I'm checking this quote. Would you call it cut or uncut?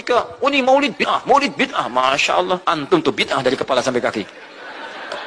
uncut